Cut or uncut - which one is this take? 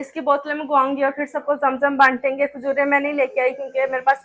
uncut